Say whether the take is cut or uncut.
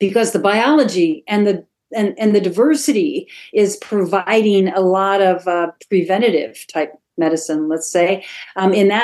uncut